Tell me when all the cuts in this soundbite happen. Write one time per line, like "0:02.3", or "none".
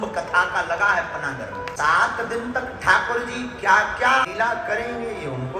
0:01.7
0:04.3